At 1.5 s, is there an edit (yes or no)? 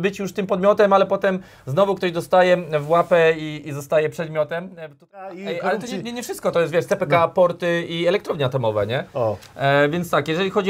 no